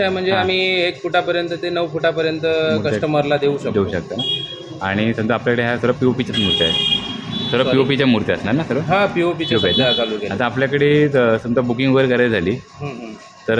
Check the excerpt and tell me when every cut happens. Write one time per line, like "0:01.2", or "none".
none